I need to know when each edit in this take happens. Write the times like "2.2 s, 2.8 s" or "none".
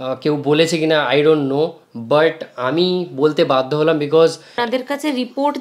4.6 s